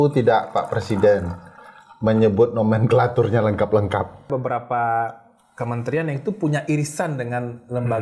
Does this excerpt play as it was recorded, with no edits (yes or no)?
no